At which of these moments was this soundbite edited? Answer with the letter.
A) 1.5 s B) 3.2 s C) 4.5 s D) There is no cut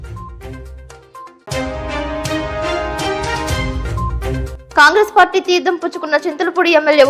C